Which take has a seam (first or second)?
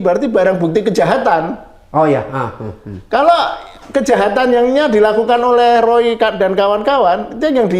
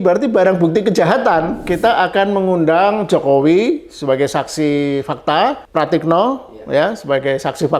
second